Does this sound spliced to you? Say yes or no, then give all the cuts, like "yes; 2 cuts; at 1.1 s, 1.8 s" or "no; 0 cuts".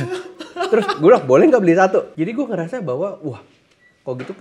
yes; 1 cut; at 2.2 s